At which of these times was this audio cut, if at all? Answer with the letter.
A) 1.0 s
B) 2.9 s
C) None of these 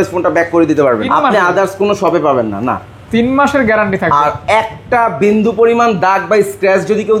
A